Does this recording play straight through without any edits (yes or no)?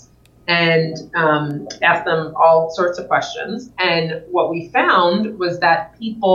yes